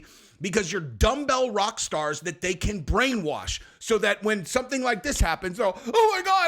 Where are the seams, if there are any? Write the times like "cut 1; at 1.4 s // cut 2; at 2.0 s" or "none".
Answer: none